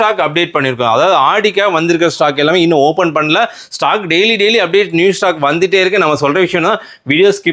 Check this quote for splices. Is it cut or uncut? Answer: uncut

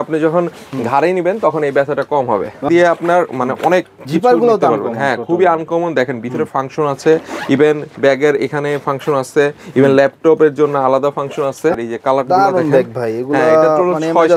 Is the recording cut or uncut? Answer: cut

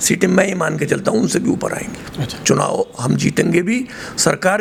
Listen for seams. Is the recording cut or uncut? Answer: uncut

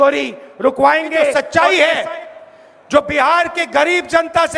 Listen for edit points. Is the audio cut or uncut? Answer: cut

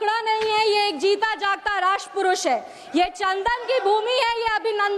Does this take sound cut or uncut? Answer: uncut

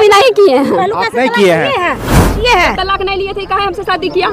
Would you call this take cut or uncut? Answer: cut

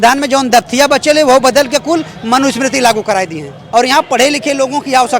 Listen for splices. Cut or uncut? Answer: cut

